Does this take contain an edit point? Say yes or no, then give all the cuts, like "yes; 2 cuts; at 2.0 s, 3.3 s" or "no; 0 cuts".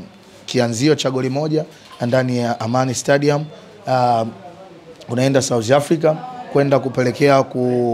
no; 0 cuts